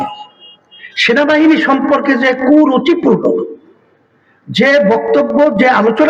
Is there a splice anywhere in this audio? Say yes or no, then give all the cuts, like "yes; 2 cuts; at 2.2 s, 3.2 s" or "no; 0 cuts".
no; 0 cuts